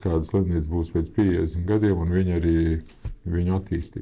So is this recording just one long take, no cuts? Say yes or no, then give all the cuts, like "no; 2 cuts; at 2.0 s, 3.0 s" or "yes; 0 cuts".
yes; 0 cuts